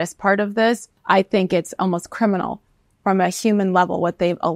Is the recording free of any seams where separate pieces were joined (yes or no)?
no